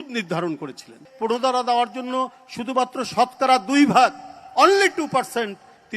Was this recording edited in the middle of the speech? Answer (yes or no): yes